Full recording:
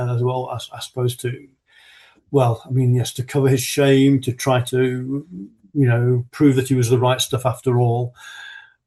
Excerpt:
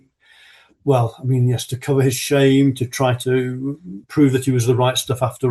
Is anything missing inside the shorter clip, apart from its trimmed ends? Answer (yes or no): yes